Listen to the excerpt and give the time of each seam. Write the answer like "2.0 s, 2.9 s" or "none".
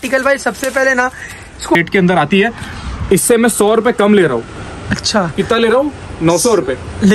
1.8 s